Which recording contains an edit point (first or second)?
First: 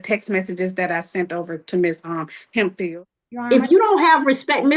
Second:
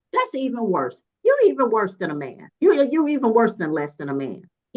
first